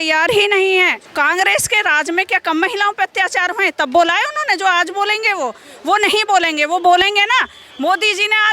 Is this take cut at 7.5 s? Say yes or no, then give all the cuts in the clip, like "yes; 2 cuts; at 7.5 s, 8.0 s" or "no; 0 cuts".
no; 1 cut; at 1.0 s